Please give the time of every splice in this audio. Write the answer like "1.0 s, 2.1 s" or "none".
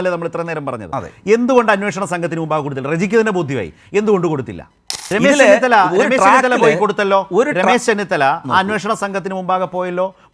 5.0 s